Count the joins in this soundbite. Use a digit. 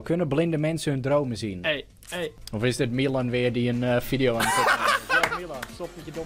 1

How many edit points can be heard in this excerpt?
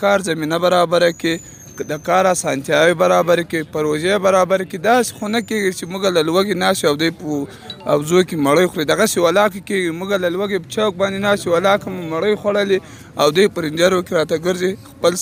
0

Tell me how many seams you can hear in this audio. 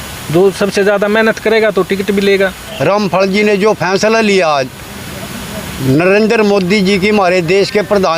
1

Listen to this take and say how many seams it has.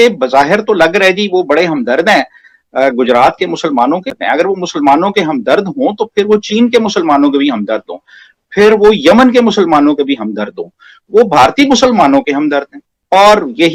0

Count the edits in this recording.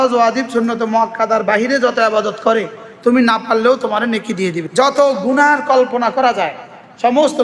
1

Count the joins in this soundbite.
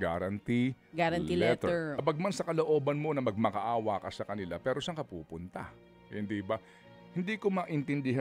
1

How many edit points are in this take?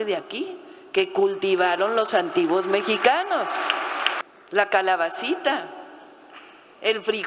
1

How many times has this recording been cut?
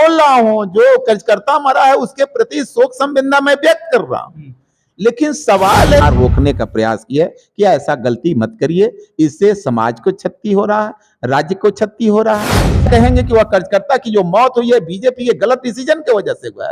2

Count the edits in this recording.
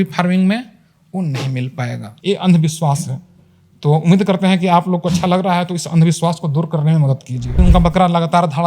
2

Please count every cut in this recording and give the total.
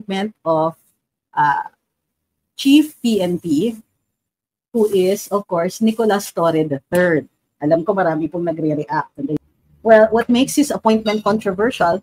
1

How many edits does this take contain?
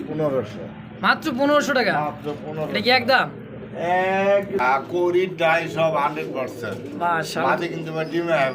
1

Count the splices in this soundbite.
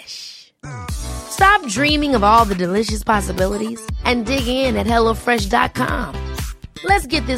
0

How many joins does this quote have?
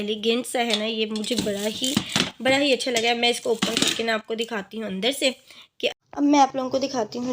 1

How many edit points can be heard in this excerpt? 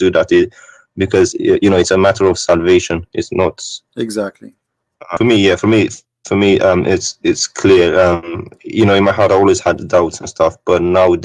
1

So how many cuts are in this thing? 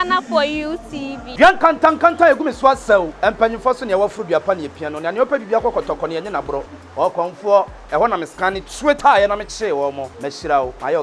0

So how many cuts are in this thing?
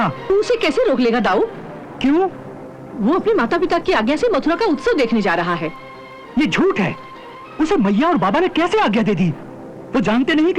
0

